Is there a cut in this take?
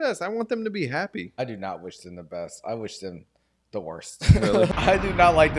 yes; 2 cuts; at 1.3 s, 4.7 s

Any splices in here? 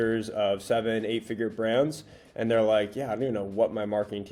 no; 0 cuts

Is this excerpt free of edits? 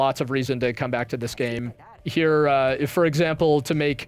no; 1 cut; at 1.6 s

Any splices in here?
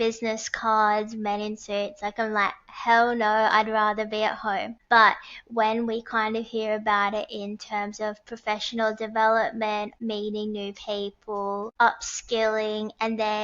yes; 3 cuts; at 4.7 s, 9.9 s, 11.7 s

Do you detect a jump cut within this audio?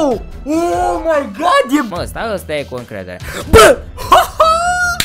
yes; 1 cut; at 1.9 s

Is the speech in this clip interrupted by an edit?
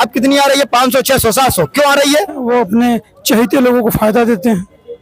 yes; 1 cut; at 2.4 s

